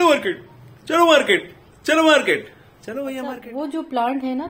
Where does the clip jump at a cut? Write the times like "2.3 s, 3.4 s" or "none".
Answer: 3.4 s